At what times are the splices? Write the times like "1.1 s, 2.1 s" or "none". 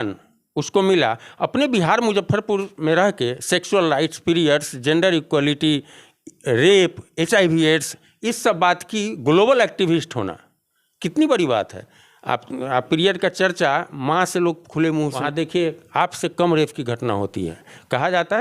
15.2 s